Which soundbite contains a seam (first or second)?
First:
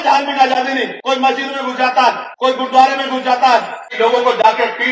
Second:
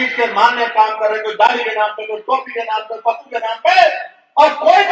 first